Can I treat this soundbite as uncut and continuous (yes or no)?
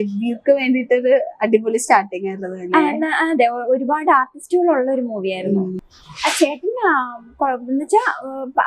no